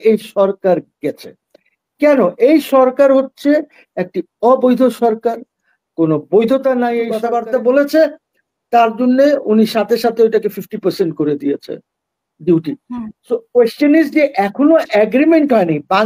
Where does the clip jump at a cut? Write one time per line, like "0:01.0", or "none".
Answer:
0:07.1